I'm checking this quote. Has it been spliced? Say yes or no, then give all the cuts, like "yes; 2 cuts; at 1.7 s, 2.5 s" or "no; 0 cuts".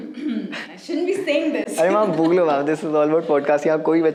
no; 0 cuts